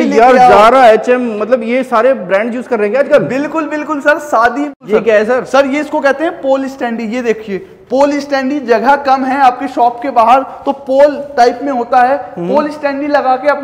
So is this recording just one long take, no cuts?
no; 1 cut; at 4.8 s

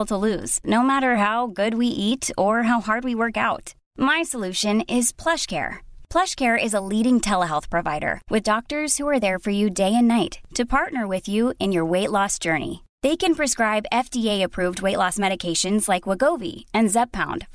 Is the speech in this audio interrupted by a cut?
no; 0 cuts

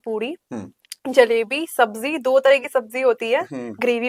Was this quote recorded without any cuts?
yes; 0 cuts

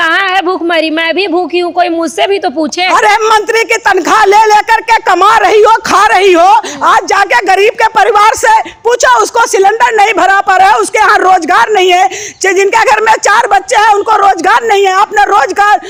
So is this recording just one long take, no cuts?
yes; 0 cuts

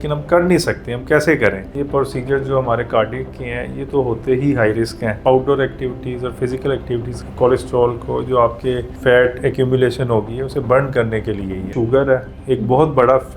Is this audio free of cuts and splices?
no; 5 cuts; at 1.7 s, 5.2 s, 7.1 s, 8.9 s, 11.7 s

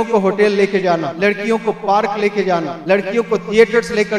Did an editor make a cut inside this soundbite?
yes; 2 cuts; at 1.1 s, 2.7 s

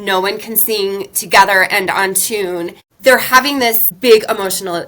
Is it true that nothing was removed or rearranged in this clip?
no; 2 cuts; at 2.8 s, 3.9 s

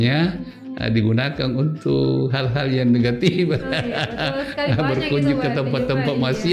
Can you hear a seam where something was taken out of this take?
no; 0 cuts

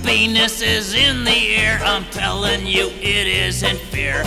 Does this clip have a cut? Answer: no; 0 cuts

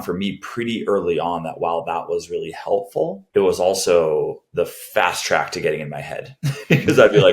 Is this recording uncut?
no; 1 cut; at 3.2 s

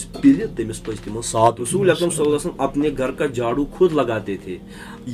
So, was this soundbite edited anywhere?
yes; 1 cut; at 1.6 s

